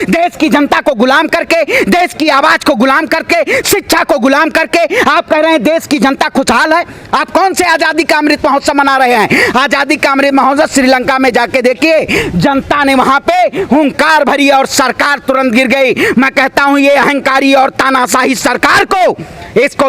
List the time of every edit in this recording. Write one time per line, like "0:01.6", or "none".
none